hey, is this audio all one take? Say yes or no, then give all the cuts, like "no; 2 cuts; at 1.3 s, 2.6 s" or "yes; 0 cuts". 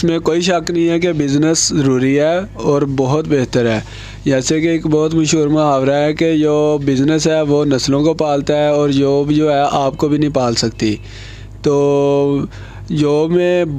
yes; 0 cuts